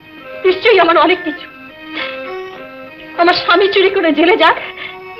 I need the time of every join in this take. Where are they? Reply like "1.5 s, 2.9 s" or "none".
none

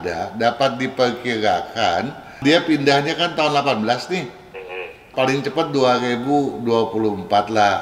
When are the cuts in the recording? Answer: 2.3 s, 5.0 s

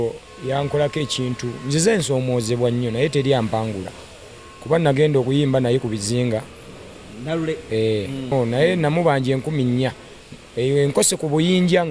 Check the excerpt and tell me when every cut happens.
8.3 s

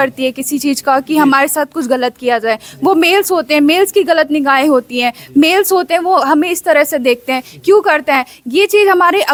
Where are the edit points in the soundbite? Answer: none

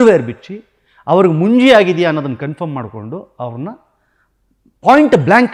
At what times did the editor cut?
none

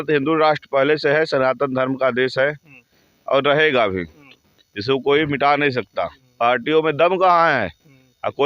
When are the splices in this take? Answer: 6.2 s

